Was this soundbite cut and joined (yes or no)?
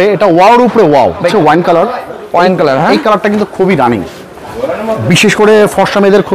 yes